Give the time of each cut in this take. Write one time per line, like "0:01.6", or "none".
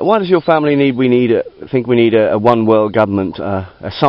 none